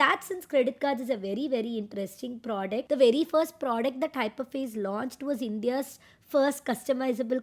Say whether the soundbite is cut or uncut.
cut